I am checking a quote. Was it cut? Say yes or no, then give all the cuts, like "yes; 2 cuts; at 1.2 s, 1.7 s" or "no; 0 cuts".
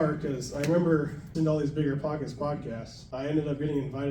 yes; 1 cut; at 1.3 s